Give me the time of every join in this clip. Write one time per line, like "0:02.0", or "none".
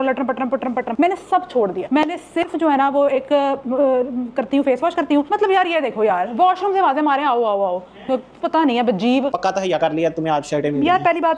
0:05.3
0:09.0